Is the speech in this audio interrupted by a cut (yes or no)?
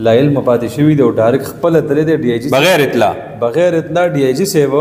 no